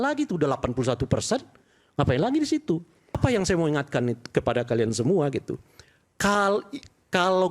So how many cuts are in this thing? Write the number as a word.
one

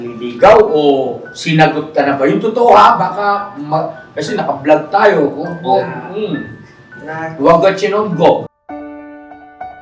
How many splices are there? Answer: one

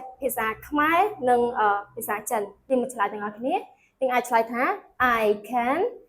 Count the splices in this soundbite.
one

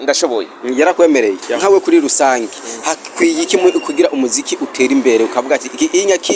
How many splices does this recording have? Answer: one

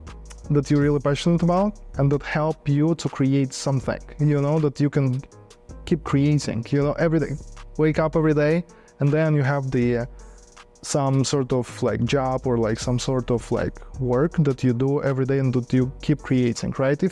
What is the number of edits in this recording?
zero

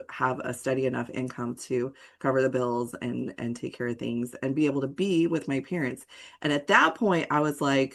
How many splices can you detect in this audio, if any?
zero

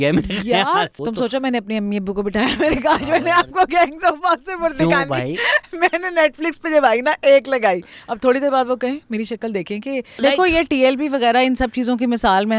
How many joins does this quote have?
two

